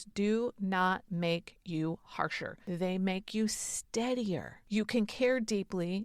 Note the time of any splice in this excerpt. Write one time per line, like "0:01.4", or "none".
0:02.5
0:04.5